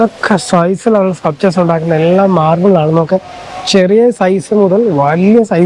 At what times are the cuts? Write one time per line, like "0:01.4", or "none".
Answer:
none